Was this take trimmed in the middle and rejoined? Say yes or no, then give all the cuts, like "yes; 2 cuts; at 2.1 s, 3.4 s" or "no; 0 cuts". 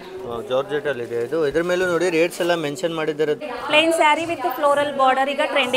yes; 1 cut; at 3.4 s